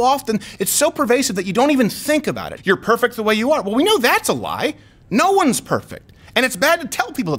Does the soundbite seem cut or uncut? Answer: cut